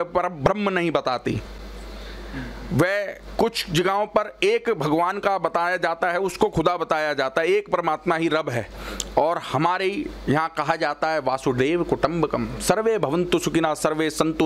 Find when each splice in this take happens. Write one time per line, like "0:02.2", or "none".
none